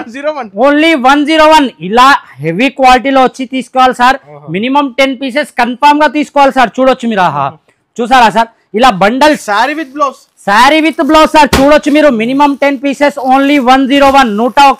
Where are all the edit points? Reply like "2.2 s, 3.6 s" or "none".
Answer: none

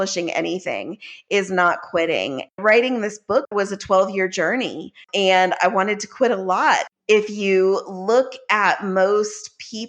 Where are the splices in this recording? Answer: 2.6 s, 3.5 s, 5.0 s, 6.8 s

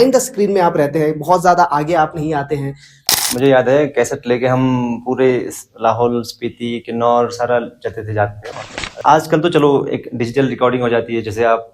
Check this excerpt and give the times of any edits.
3.1 s, 8.9 s

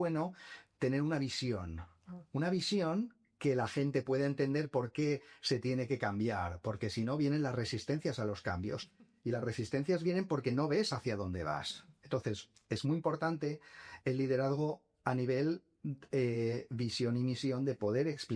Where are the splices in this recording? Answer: none

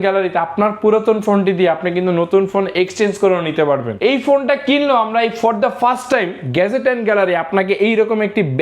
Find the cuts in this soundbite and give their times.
3.9 s

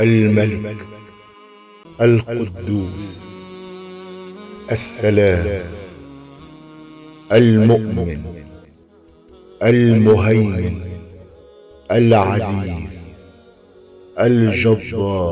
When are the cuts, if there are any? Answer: 3.2 s, 4.6 s

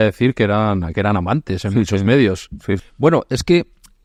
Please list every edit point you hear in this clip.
none

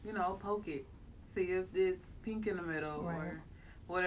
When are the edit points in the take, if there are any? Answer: none

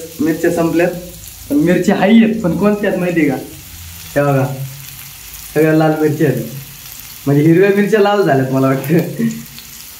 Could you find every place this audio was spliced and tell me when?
none

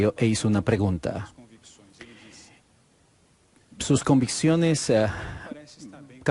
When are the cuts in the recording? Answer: none

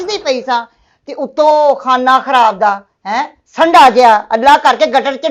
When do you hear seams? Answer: none

